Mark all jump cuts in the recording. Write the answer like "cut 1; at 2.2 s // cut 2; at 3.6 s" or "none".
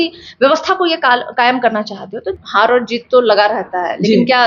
cut 1; at 2.3 s